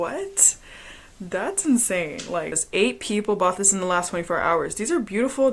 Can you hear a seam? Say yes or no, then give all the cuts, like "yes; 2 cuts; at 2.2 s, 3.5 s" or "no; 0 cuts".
yes; 1 cut; at 2.6 s